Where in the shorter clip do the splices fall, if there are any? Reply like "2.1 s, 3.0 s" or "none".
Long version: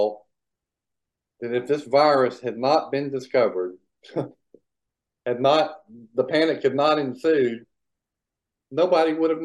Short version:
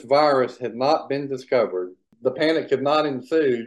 2.0 s